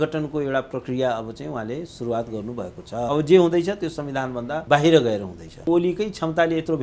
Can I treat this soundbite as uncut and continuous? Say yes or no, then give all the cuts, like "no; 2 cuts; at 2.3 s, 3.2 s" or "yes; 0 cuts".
no; 3 cuts; at 3.1 s, 4.5 s, 5.7 s